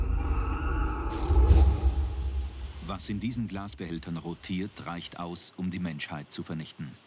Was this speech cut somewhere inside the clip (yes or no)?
no